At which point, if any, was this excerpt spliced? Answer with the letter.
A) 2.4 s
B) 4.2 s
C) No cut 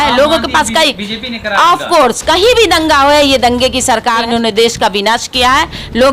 B